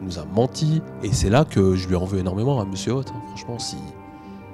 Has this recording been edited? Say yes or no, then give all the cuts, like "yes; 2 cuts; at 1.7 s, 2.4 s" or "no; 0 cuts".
yes; 1 cut; at 0.9 s